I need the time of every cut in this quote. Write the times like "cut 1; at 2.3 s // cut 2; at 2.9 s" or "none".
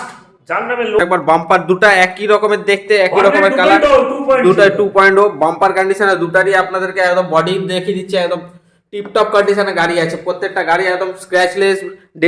cut 1; at 1.0 s